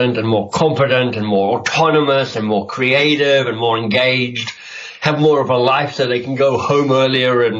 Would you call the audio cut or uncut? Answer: uncut